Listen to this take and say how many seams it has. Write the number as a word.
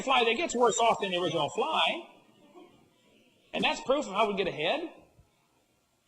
one